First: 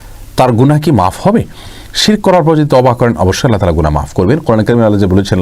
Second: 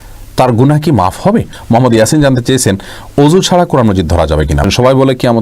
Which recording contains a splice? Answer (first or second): second